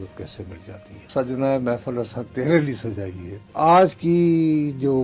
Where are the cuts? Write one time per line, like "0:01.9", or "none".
0:01.1
0:03.5